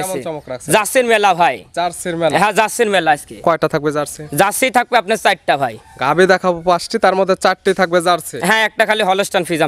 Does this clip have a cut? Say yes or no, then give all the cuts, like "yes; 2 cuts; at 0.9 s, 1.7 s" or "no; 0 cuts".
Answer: no; 0 cuts